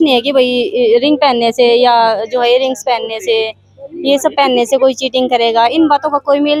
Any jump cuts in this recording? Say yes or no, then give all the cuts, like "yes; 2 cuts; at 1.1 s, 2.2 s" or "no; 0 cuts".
no; 0 cuts